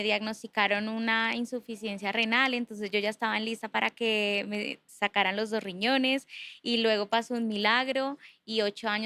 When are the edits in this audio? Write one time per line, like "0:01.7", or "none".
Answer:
none